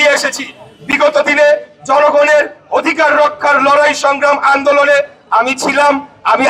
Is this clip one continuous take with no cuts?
yes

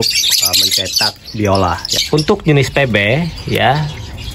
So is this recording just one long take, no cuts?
no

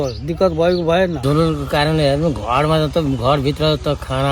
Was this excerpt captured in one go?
no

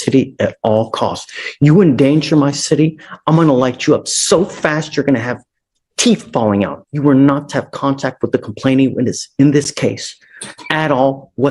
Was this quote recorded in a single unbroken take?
no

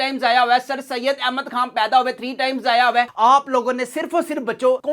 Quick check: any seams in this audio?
yes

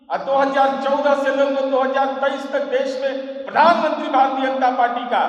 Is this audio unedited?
yes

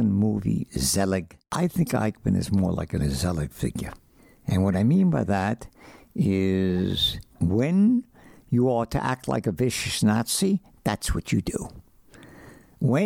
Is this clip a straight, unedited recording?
no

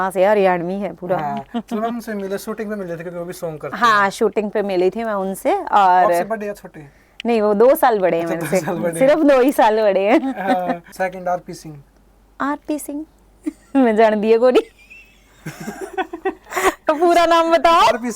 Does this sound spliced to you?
yes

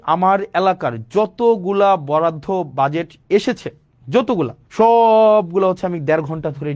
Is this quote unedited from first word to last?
no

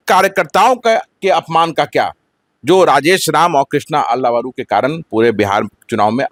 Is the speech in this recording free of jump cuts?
yes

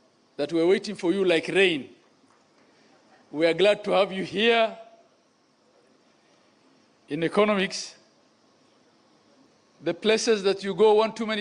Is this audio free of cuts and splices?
no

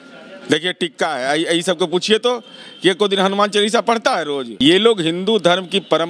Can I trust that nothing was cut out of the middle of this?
no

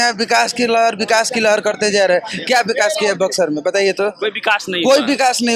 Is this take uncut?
yes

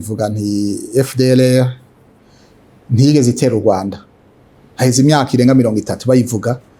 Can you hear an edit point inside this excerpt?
no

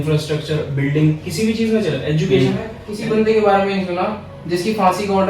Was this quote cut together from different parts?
yes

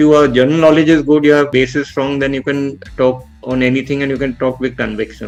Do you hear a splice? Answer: no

